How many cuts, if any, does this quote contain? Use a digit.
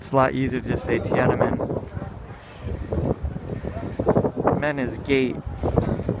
1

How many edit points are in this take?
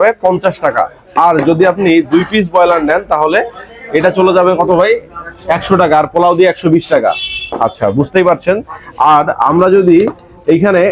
0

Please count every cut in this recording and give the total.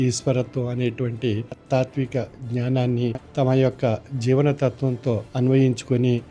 3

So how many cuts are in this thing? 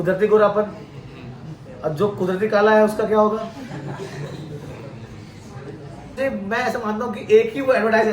1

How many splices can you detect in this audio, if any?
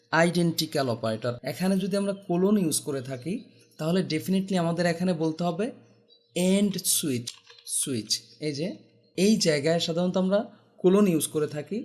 3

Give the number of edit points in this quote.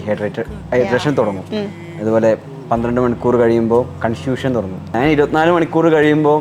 1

